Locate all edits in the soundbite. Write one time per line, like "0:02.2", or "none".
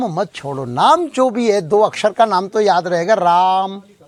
none